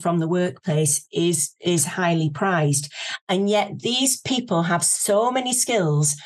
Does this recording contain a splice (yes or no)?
no